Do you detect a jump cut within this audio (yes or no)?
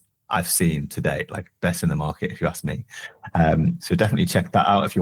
no